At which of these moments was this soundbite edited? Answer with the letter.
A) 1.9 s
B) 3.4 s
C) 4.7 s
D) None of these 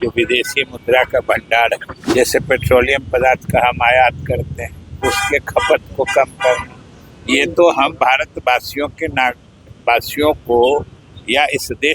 A